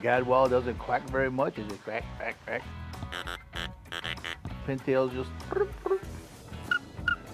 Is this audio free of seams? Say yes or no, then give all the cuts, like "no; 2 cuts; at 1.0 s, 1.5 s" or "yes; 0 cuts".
yes; 0 cuts